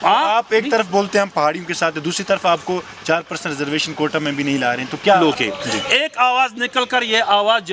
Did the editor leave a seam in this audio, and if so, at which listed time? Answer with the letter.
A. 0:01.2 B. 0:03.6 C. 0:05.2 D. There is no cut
C